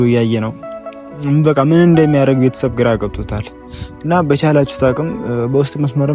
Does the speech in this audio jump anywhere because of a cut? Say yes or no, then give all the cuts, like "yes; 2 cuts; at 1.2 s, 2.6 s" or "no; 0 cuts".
no; 0 cuts